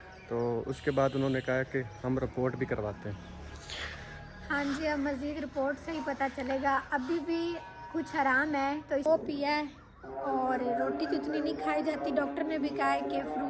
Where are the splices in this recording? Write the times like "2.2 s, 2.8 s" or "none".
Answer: 9.1 s